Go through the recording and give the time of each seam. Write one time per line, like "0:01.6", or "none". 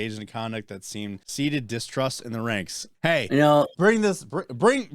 0:01.2
0:02.8